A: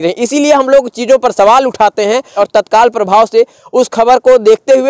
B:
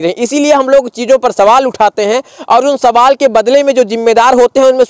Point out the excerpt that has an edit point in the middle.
A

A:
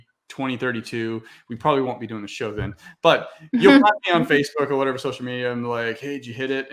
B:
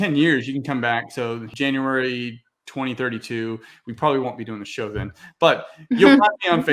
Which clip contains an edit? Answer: B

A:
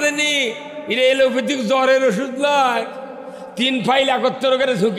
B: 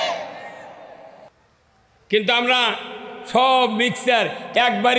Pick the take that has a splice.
B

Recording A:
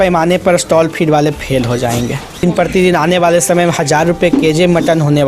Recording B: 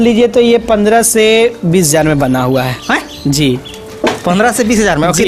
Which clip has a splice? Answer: A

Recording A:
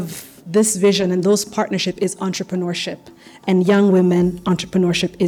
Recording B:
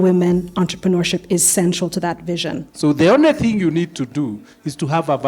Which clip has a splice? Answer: B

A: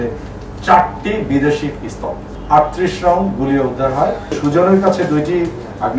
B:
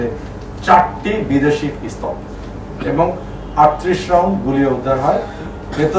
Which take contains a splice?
A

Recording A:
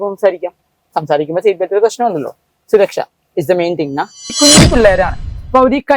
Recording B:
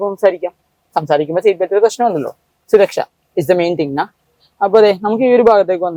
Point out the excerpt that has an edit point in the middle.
A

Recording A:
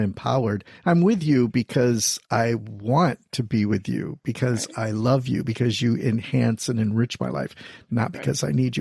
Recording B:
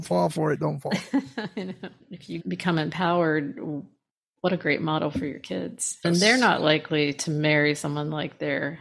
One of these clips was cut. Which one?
B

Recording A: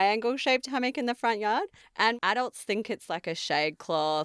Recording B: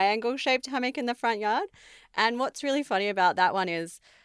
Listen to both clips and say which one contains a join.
A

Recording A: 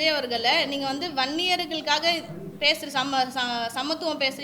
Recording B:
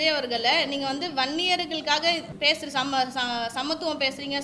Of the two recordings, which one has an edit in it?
B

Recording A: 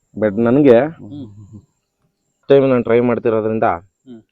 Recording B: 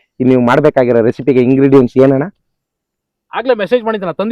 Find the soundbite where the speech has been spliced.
A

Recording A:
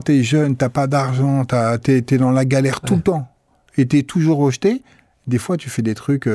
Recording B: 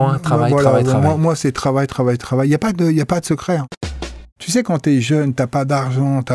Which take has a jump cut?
B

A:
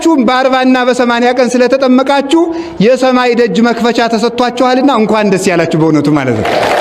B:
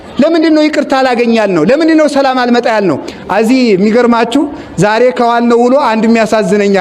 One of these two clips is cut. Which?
B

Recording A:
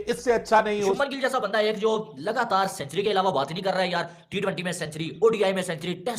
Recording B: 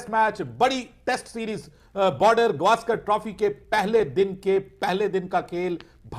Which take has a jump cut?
A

